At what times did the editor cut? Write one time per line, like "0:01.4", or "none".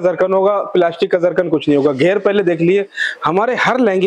none